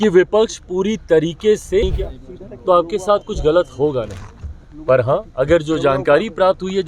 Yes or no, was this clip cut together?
yes